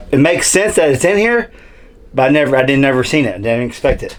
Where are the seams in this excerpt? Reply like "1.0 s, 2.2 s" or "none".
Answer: none